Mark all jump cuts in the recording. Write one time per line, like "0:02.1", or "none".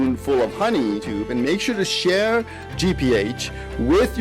0:01.1